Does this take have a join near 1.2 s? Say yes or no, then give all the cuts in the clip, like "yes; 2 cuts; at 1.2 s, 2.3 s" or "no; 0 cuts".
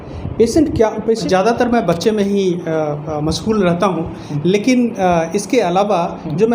yes; 1 cut; at 1.2 s